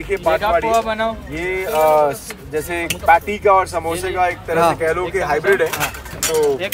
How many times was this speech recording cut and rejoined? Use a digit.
0